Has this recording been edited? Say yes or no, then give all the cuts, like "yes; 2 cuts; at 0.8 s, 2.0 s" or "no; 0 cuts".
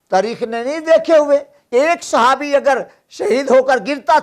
yes; 1 cut; at 1.6 s